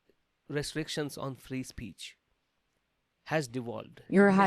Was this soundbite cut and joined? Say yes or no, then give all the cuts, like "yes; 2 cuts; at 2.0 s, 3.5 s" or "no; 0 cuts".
no; 0 cuts